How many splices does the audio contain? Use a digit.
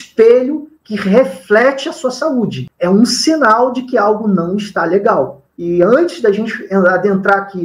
1